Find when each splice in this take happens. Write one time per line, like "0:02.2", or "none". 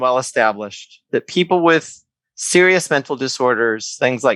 none